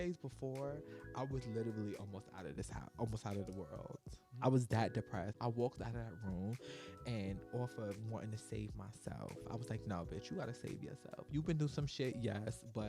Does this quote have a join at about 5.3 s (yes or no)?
yes